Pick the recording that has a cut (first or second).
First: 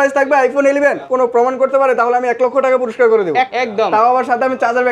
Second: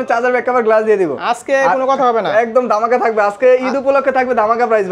first